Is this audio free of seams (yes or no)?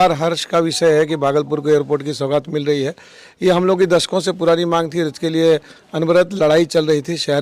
yes